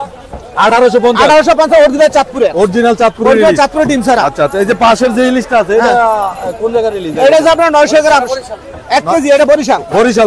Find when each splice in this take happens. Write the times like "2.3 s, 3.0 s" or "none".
none